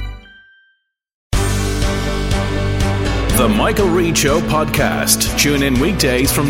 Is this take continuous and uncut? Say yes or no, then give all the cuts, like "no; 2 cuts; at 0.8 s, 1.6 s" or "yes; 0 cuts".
no; 1 cut; at 1.2 s